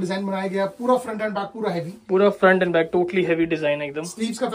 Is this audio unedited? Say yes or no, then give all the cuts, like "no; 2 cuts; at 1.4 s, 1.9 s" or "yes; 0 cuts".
yes; 0 cuts